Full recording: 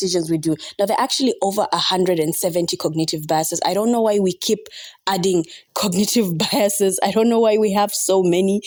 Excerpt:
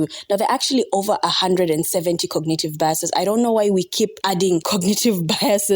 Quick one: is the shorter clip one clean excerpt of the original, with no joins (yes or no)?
no